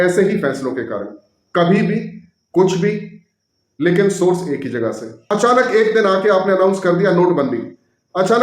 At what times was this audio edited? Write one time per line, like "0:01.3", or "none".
0:05.1

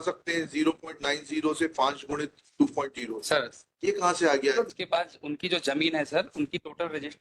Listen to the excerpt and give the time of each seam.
0:04.7

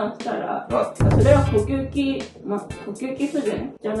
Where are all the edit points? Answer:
0:01.0

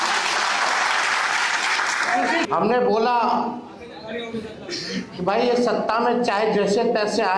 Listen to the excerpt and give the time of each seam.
0:02.5

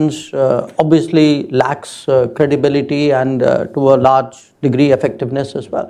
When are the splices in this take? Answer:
none

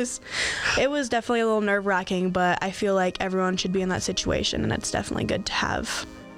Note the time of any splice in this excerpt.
none

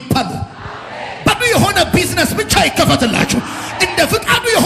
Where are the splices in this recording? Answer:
0:00.9

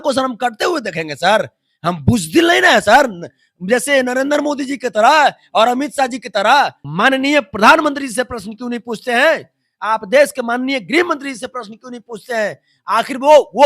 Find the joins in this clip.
0:06.8

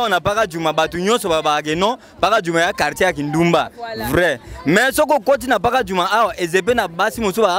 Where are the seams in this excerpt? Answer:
none

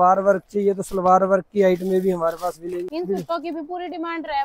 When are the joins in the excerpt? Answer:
0:02.9

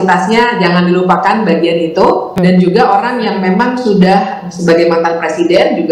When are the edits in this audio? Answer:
0:02.4

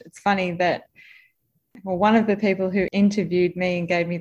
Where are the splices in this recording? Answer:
0:01.6
0:02.9

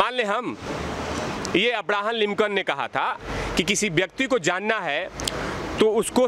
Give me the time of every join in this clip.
0:01.3
0:03.2

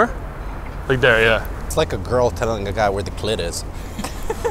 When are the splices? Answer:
0:01.6

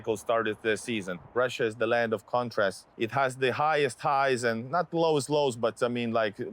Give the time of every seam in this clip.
0:01.3
0:02.9

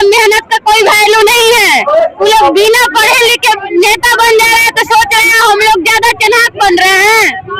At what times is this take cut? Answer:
none

